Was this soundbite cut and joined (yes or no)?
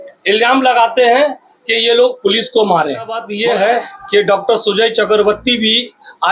yes